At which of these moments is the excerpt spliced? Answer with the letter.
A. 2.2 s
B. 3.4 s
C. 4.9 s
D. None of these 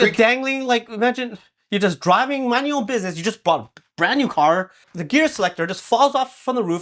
C